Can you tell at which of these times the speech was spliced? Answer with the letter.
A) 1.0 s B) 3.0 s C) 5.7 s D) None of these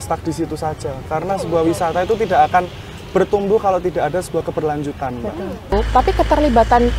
C